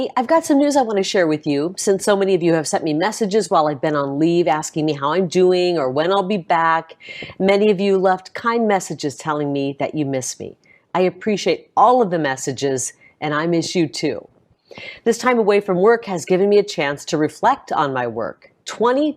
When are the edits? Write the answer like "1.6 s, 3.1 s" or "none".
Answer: 6.9 s